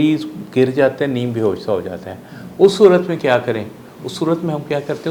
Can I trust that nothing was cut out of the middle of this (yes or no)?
yes